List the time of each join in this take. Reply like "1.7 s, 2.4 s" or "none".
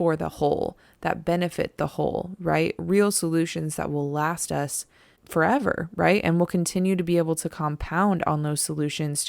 none

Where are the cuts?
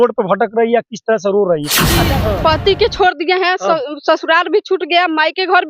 2.0 s

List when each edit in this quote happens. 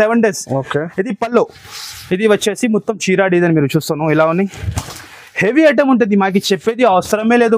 none

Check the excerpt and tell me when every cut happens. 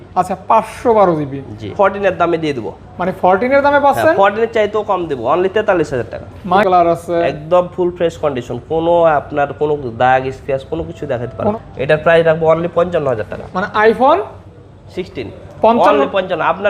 1.7 s, 6.6 s, 11.5 s

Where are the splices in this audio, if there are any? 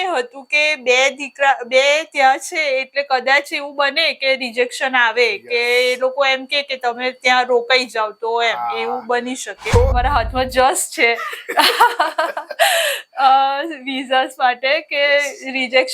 10.0 s

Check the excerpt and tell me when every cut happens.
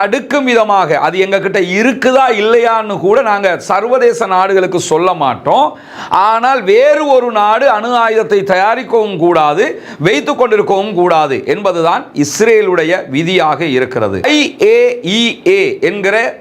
14.2 s

